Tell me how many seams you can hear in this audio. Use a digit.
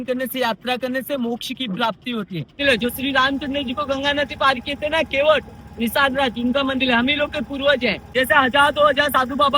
2